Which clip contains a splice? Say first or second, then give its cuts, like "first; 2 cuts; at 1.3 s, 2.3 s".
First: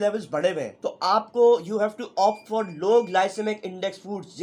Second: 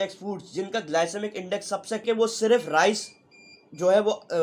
second; 1 cut; at 2.0 s